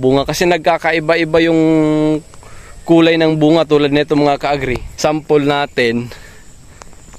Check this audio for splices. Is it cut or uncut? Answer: cut